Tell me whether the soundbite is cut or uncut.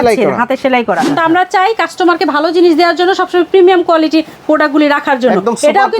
cut